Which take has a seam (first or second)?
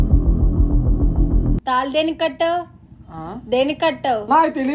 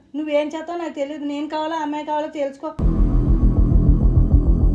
first